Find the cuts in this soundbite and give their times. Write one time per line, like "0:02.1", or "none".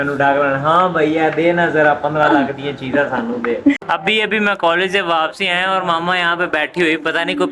0:03.9